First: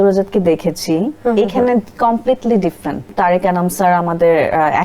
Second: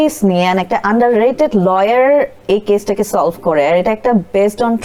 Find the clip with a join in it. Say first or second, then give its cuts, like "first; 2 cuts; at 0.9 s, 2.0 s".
first; 1 cut; at 3.1 s